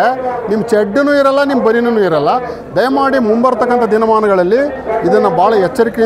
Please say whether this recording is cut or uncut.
uncut